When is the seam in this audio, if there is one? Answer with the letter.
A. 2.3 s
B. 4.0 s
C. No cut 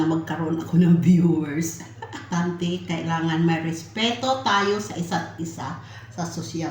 A